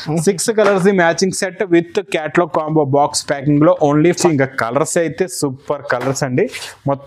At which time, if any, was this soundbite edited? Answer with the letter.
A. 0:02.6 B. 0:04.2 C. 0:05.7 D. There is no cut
B